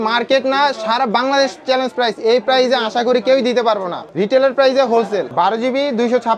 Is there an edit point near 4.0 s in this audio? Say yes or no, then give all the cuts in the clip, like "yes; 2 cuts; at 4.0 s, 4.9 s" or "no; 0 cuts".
no; 0 cuts